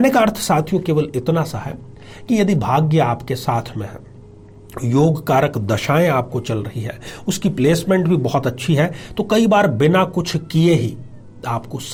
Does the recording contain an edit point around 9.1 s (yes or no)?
no